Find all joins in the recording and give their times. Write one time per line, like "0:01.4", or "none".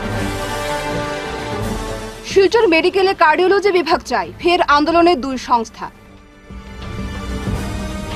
0:02.0